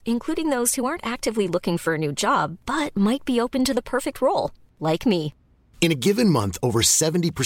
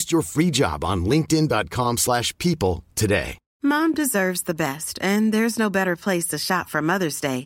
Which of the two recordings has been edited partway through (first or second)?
second